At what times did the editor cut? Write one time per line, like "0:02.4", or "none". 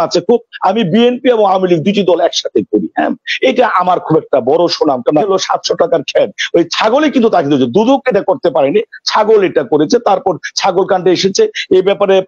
0:05.2